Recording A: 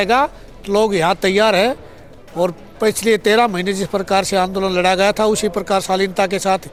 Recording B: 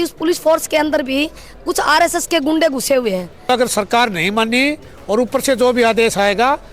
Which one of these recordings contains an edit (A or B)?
B